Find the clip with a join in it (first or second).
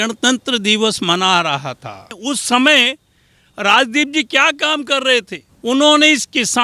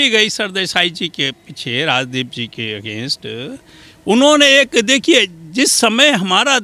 first